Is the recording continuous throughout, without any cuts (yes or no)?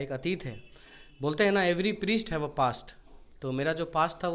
yes